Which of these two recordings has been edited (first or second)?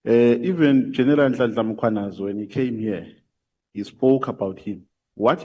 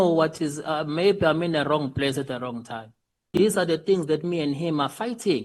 second